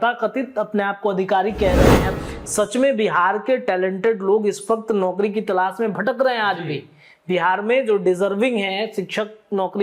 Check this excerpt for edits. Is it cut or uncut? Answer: cut